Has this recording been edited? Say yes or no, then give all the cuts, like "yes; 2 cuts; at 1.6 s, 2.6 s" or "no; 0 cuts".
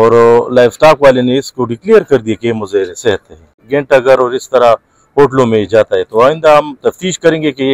yes; 1 cut; at 3.6 s